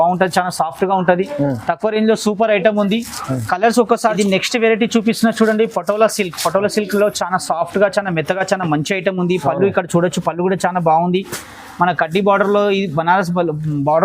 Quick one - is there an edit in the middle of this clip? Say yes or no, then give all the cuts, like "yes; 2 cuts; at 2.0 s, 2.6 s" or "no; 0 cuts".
yes; 1 cut; at 4.1 s